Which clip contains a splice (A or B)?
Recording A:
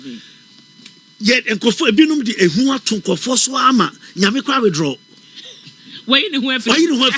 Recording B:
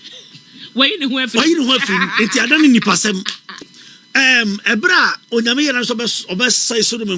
B